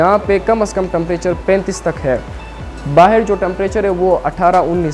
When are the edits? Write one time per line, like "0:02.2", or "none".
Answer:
none